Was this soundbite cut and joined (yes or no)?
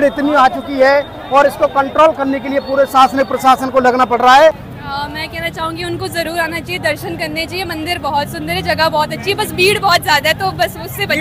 yes